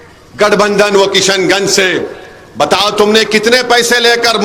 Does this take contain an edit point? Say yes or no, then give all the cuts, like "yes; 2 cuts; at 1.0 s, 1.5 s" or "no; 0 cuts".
no; 0 cuts